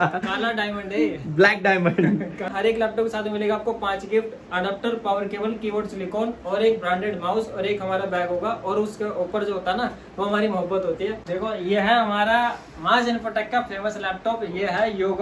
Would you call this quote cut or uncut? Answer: cut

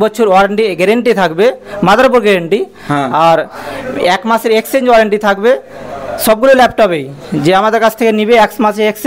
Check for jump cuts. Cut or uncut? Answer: uncut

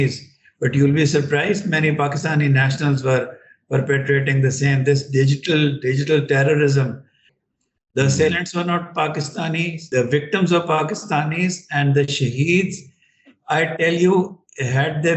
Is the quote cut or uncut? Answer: cut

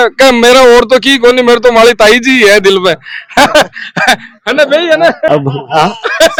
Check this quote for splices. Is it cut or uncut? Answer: uncut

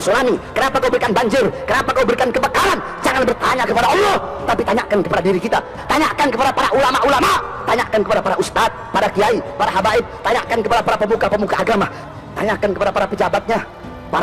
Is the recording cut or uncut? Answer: cut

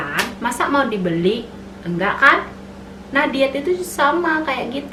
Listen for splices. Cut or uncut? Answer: uncut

